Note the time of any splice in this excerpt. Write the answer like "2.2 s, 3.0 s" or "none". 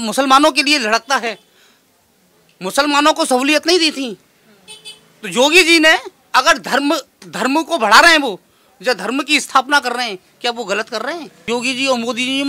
11.5 s